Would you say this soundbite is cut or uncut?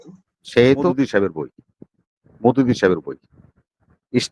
cut